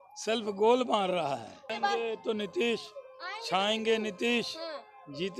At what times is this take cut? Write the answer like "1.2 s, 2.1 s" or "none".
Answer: 1.7 s